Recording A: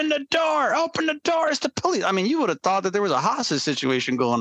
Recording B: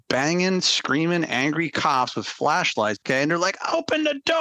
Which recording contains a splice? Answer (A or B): B